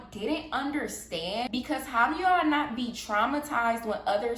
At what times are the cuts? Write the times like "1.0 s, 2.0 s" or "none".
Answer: 1.5 s